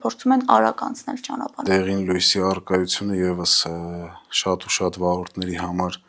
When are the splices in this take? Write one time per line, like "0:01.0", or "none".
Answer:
0:01.6